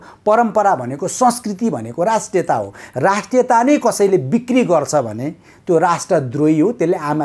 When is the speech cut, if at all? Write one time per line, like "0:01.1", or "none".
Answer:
none